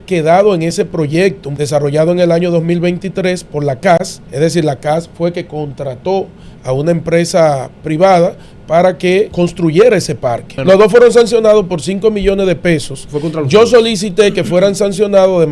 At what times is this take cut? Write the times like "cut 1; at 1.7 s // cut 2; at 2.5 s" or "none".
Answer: cut 1; at 1.5 s // cut 2; at 4.2 s // cut 3; at 9.3 s // cut 4; at 10.5 s